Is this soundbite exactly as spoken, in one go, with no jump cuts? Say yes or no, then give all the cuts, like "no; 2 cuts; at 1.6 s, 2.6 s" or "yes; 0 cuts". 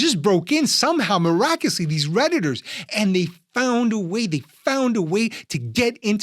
yes; 0 cuts